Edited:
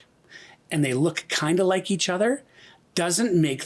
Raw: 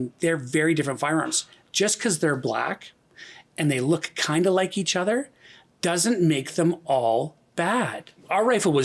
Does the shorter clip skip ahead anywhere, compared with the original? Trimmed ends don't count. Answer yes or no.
no